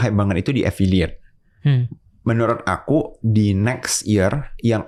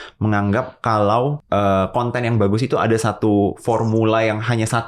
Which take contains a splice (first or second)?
second